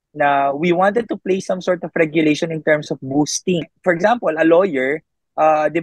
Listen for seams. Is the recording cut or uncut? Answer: cut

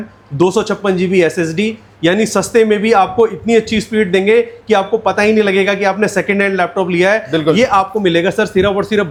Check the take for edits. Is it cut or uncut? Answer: uncut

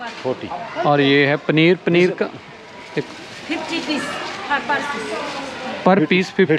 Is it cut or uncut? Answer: uncut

